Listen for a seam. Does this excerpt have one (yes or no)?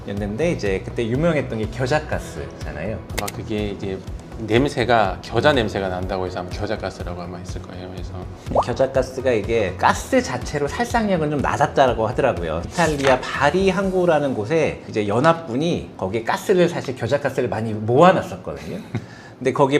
yes